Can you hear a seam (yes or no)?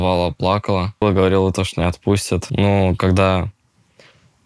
yes